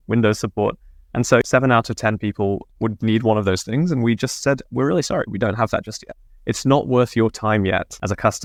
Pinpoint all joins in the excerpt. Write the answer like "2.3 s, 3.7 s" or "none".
none